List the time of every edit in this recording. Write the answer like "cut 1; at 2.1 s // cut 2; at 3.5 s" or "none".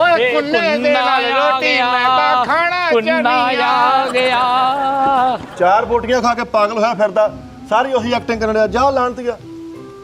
cut 1; at 5.5 s